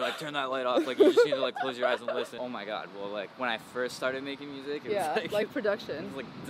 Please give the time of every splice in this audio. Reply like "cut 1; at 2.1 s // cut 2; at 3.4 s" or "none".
cut 1; at 2.3 s